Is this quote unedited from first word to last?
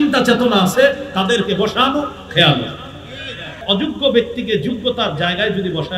no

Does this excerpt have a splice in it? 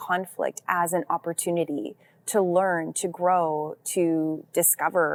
no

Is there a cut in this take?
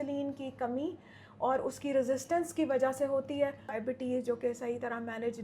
yes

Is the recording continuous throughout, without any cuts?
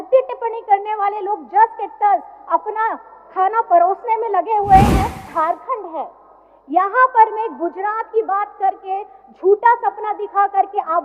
no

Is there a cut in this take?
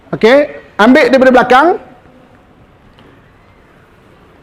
no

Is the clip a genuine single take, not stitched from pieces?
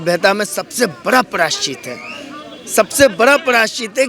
yes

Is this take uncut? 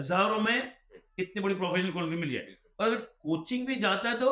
yes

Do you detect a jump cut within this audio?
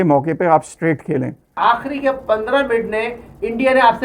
yes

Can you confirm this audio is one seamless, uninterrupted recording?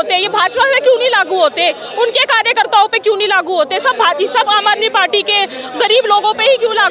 yes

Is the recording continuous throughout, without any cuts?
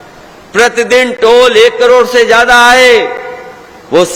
yes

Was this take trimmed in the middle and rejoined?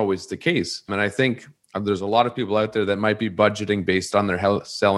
yes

